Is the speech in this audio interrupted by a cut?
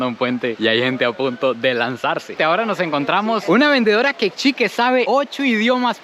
yes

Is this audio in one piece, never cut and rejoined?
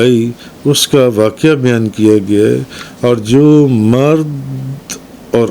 yes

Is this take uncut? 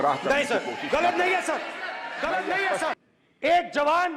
no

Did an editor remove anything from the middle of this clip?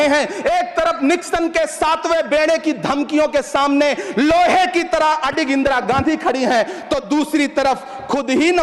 no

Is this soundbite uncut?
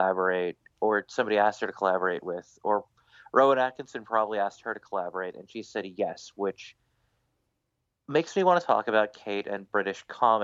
yes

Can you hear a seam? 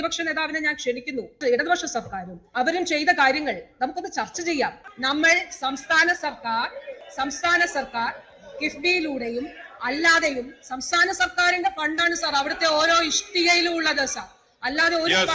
yes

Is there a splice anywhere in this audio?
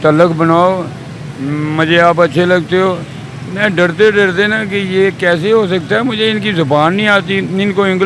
no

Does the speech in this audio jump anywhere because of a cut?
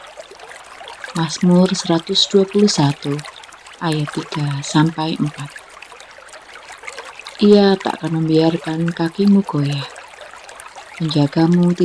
yes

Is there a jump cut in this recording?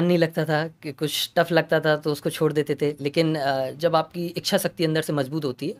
no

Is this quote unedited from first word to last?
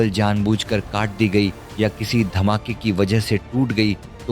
yes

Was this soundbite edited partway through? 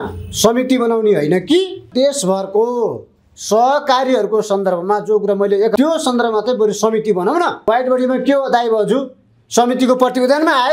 yes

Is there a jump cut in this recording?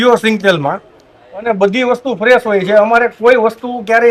no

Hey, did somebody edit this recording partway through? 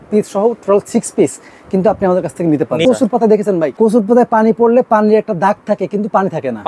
yes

